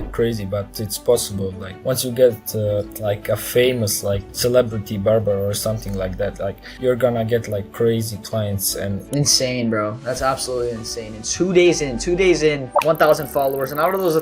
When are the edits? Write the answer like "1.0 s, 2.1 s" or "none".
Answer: 1.7 s, 2.9 s, 4.3 s, 6.7 s, 9.0 s, 12.7 s